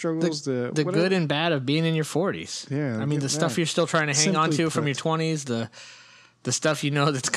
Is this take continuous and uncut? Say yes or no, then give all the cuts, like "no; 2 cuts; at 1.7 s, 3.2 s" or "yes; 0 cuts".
no; 1 cut; at 3.1 s